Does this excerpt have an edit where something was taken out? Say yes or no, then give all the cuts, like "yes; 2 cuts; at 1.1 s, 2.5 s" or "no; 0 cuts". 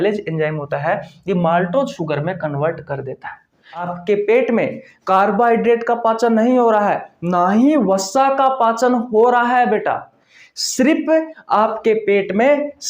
yes; 1 cut; at 3.8 s